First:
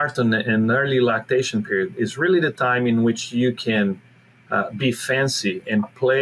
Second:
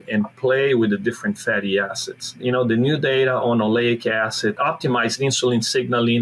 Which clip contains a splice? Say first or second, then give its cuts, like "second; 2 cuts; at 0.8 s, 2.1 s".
second; 2 cuts; at 2.4 s, 4.6 s